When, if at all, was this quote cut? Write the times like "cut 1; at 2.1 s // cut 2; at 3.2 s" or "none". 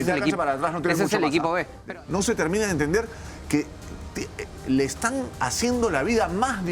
cut 1; at 1.8 s